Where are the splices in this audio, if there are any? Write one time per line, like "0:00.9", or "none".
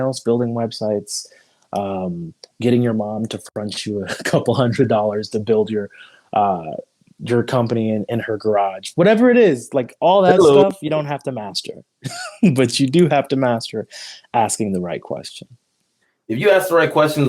0:16.1